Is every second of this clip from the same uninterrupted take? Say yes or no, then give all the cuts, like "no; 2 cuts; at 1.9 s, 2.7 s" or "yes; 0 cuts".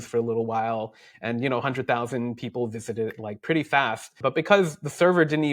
yes; 0 cuts